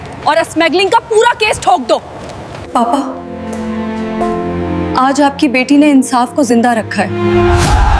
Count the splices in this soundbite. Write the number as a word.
zero